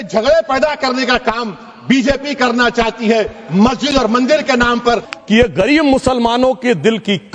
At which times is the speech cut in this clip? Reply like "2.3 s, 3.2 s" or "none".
5.1 s